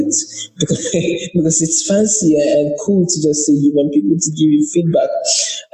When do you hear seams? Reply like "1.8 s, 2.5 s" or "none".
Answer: none